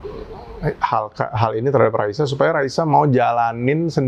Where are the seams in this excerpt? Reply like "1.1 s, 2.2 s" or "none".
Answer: none